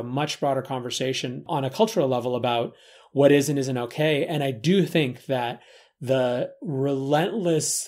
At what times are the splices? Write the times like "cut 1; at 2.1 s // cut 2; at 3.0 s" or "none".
cut 1; at 1.4 s